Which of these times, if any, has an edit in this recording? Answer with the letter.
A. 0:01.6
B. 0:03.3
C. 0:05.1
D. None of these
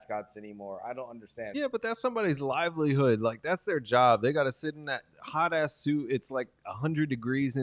A